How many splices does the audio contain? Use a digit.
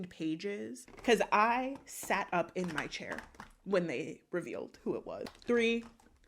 2